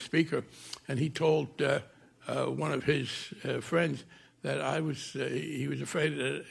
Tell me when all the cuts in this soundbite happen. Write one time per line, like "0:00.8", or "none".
none